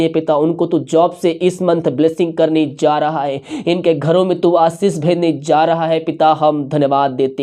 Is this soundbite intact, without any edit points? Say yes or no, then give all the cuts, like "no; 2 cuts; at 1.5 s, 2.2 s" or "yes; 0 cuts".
yes; 0 cuts